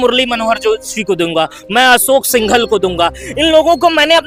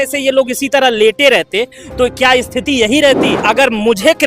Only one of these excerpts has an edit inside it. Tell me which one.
second; 1 cut; at 3.3 s

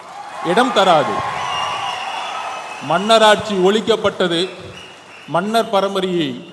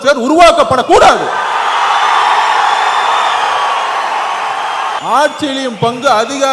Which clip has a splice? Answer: second; 1 cut; at 5.0 s

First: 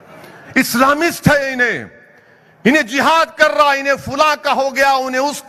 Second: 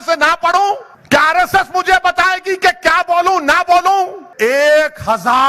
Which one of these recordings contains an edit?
second; 2 cuts; at 0.9 s, 4.2 s

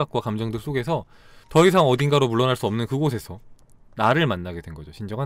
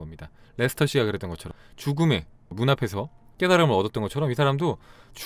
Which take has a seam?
second; 1 cut; at 1.5 s

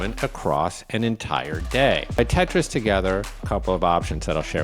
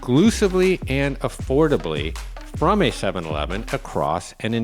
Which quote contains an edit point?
first; 2 cuts; at 2.2 s, 3.4 s

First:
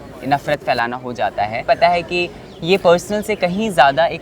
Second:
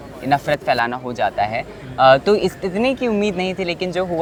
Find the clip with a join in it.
first; 1 cut; at 1.6 s

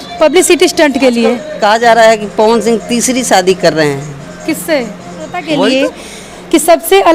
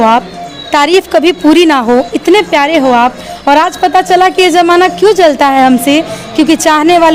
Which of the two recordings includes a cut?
first; 2 cuts; at 1.5 s, 5.4 s

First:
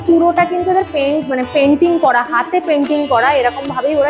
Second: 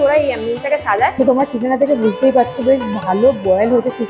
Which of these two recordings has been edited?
second; 1 cut; at 1.1 s

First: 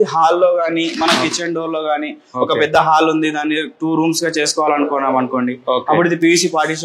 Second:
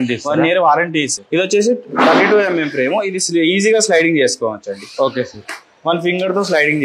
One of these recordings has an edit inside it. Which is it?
second; 1 cut; at 1.2 s

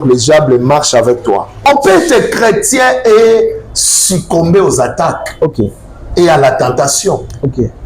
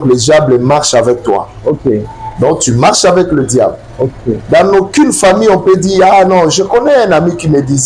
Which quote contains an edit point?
first; 1 cut; at 1.6 s

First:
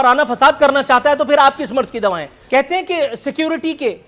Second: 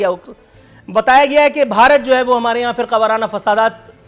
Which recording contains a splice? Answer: first; 1 cut; at 2.3 s

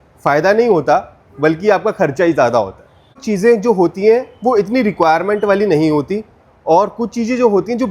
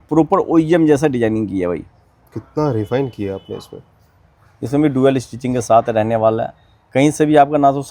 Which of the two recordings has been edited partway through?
first; 1 cut; at 3.2 s

